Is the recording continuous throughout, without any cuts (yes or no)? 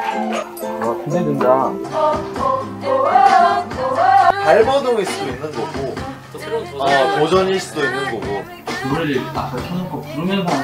no